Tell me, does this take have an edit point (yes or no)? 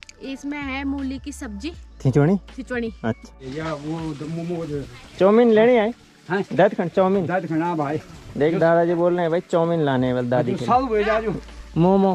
yes